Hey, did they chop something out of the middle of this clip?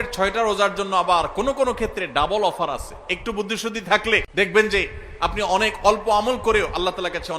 yes; 1 cut; at 4.3 s

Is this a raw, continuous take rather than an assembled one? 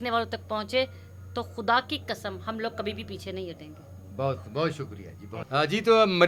yes; 0 cuts

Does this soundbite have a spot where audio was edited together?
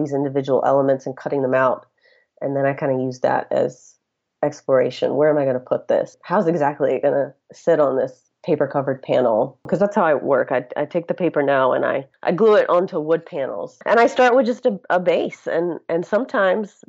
yes; 1 cut; at 9.7 s

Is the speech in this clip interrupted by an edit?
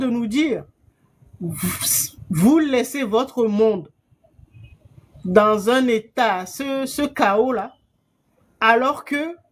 no; 0 cuts

